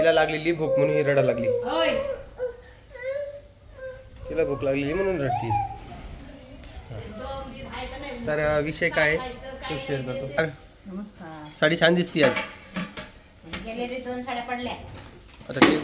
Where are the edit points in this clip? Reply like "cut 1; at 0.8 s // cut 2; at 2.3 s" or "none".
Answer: cut 1; at 10.4 s